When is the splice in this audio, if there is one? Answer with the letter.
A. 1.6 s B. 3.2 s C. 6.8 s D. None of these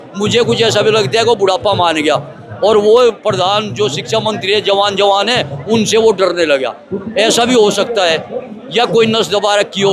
D